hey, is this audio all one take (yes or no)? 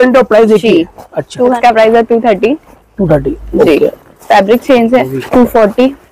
no